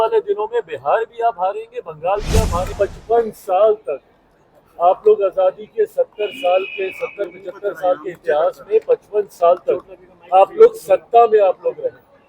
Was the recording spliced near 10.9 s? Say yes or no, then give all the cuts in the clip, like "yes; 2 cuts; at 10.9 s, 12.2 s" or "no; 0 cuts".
no; 1 cut; at 2.7 s